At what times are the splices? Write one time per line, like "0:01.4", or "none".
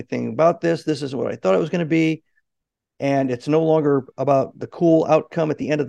none